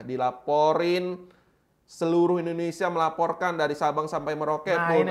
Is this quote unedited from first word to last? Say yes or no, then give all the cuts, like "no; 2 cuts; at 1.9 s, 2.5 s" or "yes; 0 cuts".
yes; 0 cuts